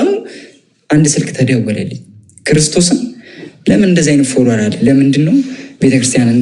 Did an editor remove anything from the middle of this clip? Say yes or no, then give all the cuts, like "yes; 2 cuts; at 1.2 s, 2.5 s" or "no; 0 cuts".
no; 0 cuts